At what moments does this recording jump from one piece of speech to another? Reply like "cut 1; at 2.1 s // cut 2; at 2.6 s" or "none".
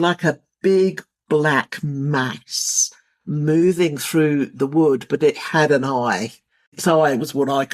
cut 1; at 6.7 s